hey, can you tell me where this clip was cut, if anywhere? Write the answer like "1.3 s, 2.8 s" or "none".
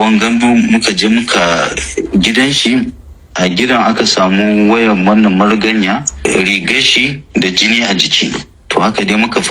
6.1 s